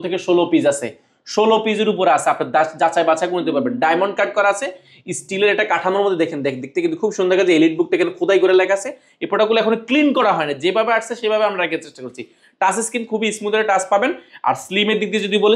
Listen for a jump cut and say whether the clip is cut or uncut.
uncut